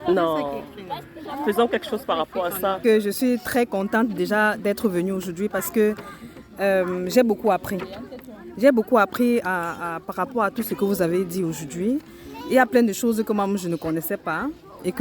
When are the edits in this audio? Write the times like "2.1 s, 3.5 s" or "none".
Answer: 2.8 s